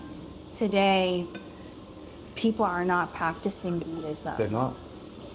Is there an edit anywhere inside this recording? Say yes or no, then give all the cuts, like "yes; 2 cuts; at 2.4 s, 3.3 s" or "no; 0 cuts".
no; 0 cuts